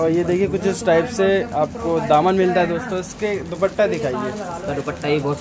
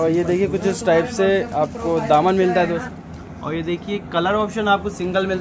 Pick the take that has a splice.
second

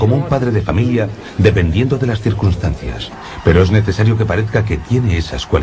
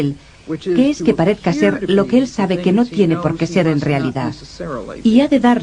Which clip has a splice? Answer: first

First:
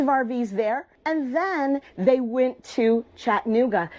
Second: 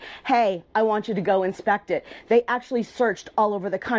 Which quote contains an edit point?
first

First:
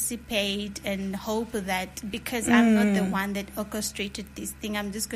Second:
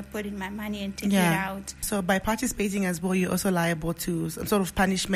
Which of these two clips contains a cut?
second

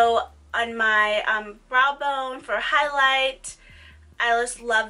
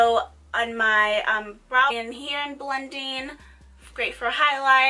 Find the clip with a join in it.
first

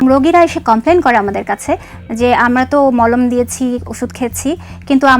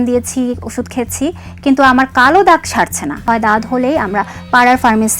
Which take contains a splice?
second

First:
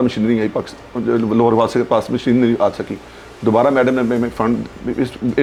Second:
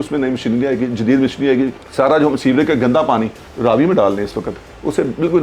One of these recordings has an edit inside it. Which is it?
second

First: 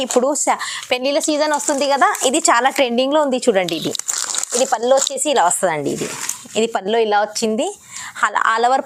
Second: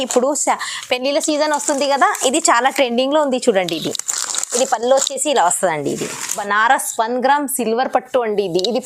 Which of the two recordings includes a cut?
second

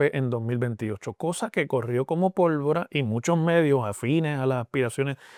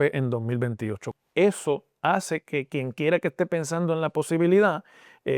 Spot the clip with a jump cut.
second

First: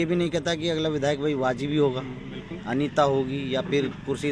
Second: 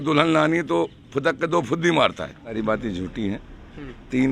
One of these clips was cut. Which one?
second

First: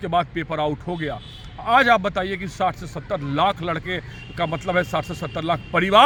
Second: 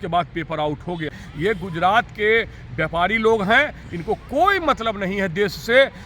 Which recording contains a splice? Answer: second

